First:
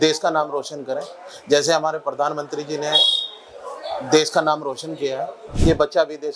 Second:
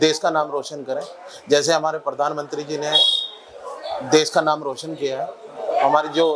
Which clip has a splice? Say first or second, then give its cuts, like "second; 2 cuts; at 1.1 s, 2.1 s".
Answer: first; 1 cut; at 5.4 s